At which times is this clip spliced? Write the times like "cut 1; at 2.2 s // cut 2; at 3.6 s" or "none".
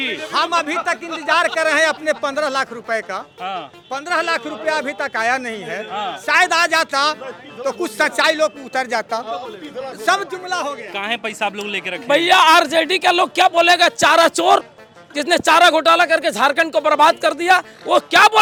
none